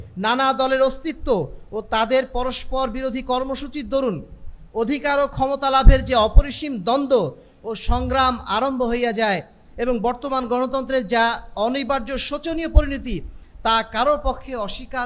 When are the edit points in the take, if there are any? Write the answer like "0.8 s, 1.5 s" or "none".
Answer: none